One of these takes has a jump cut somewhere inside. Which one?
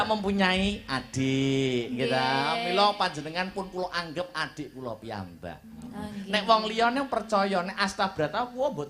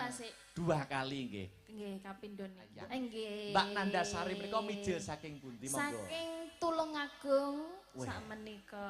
second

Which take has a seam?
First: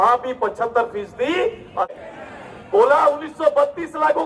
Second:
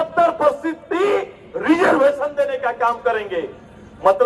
first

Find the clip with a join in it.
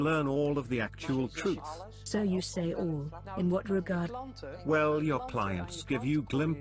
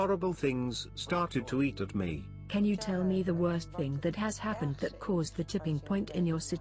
second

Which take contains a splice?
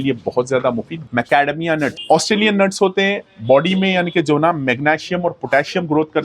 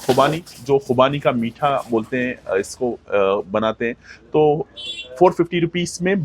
first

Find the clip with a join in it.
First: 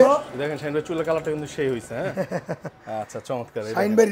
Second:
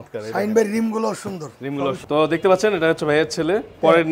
second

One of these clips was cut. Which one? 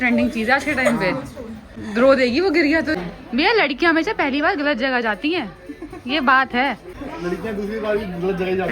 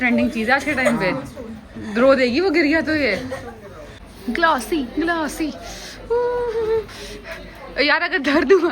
first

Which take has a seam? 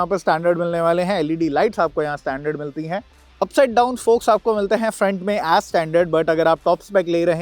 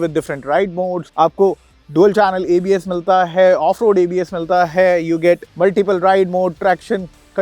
first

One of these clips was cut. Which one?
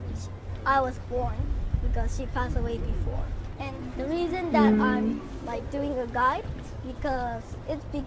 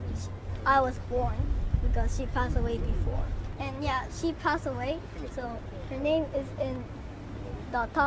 first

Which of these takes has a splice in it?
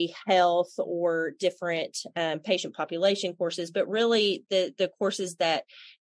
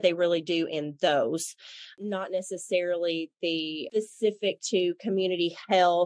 second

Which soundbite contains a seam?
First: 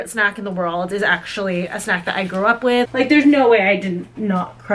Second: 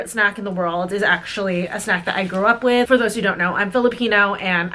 first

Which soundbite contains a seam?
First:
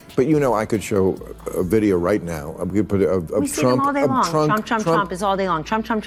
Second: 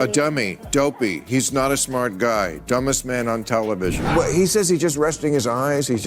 second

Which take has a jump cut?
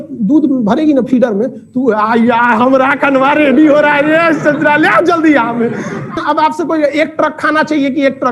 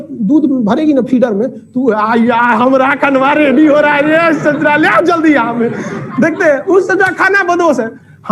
first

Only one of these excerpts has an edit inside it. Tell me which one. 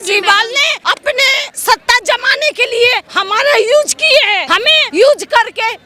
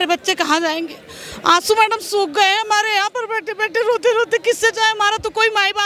first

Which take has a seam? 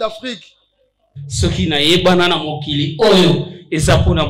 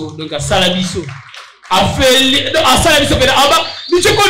first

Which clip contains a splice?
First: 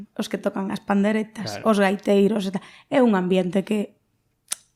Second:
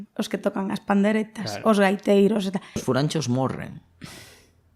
second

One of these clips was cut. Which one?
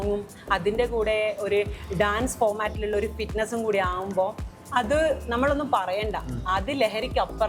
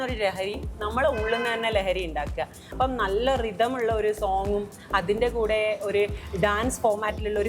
second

